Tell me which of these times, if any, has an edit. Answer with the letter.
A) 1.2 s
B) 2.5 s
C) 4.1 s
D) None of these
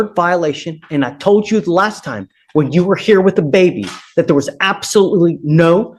D